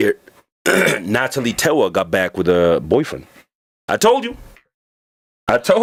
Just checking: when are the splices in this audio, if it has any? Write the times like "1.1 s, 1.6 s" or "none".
none